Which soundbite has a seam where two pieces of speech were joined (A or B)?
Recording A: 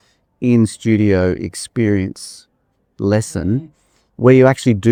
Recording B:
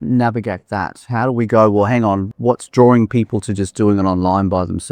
B